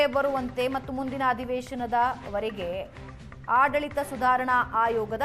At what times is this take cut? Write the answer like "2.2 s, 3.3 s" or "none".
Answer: none